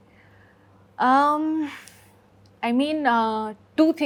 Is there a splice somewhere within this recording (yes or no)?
no